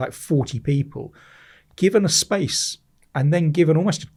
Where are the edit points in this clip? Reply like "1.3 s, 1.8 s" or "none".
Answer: none